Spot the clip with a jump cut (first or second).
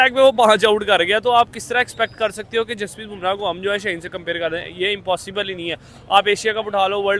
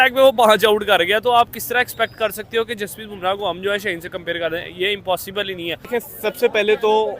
second